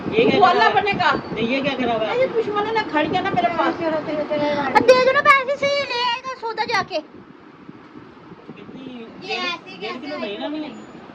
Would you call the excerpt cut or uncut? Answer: uncut